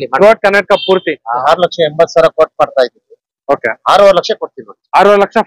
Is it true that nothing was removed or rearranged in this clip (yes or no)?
no